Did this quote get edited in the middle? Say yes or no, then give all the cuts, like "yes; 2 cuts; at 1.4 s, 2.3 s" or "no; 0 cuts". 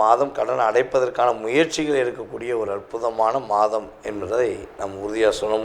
no; 0 cuts